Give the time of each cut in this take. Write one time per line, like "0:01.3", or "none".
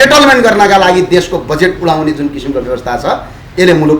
none